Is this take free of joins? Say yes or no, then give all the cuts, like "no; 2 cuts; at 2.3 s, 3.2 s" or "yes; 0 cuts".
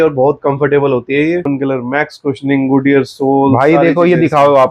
no; 1 cut; at 1.5 s